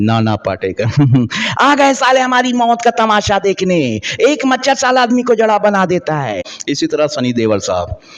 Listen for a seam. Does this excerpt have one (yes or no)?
yes